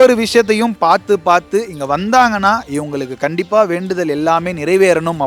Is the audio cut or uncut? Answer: uncut